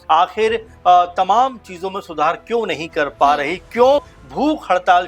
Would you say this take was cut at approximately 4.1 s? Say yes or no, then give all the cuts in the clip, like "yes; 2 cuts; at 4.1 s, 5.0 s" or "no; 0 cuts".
yes; 1 cut; at 4.1 s